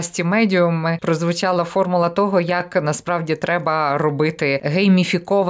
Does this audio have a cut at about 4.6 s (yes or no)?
yes